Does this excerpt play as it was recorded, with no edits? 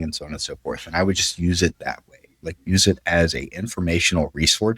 yes; 0 cuts

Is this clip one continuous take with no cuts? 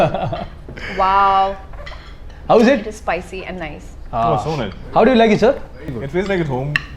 yes; 0 cuts

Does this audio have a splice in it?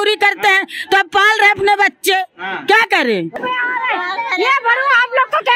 yes; 1 cut; at 3.4 s

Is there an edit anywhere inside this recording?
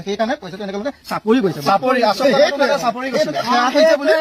no; 0 cuts

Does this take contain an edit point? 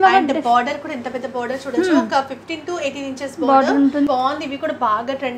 yes; 1 cut; at 4.1 s

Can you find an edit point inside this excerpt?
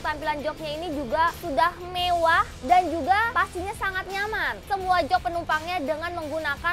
yes; 1 cut; at 4.6 s

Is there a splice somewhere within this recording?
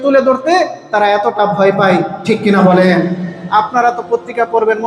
no; 0 cuts

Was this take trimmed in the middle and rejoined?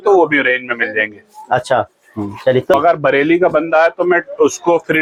no; 0 cuts

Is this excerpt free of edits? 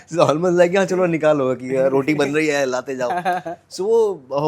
yes; 0 cuts

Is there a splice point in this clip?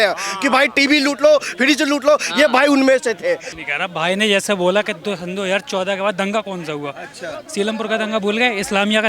yes; 1 cut; at 3.6 s

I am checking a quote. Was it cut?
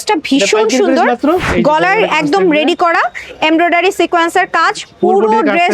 yes; 1 cut; at 1.5 s

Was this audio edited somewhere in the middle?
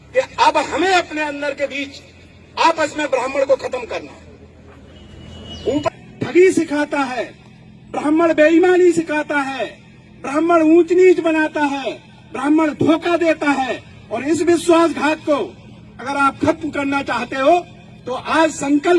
yes; 1 cut; at 5.9 s

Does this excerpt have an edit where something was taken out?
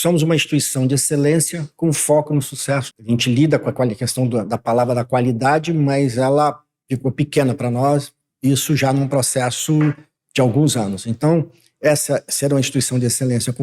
yes; 1 cut; at 2.9 s

